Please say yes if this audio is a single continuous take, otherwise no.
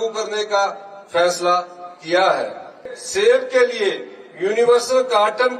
no